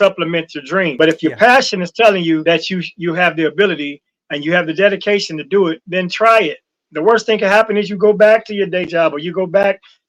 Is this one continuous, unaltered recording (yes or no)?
no